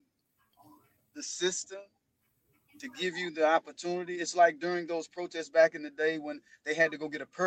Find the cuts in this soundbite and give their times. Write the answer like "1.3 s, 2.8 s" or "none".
none